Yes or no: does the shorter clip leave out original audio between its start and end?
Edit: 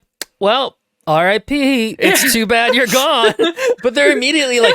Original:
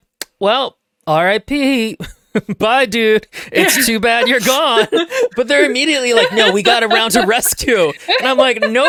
yes